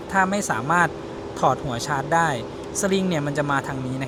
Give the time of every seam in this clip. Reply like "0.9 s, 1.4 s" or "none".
none